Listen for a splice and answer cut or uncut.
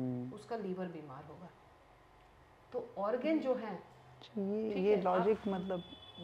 uncut